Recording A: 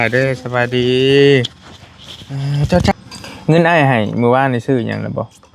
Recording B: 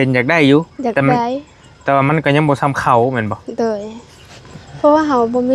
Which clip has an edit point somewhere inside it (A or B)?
A